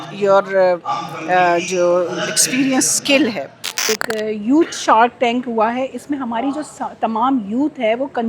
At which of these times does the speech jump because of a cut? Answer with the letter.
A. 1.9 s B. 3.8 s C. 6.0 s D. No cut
B